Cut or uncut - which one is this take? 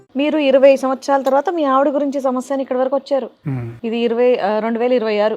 uncut